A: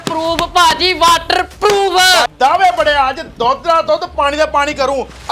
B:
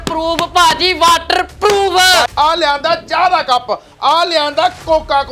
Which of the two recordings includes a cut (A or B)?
B